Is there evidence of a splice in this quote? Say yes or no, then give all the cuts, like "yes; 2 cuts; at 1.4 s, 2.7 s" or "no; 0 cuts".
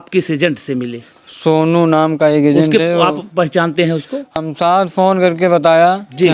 yes; 1 cut; at 4.4 s